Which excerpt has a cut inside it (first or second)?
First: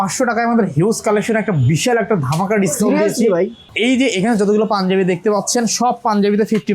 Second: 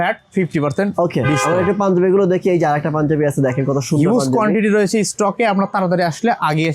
first